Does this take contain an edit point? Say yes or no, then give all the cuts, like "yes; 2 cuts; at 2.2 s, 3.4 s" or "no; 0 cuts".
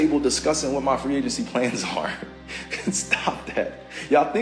no; 0 cuts